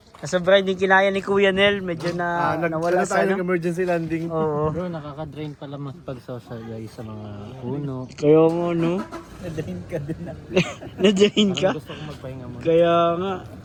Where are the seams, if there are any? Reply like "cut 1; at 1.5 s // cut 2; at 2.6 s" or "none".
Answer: none